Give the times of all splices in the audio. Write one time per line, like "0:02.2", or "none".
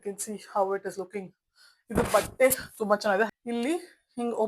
0:03.3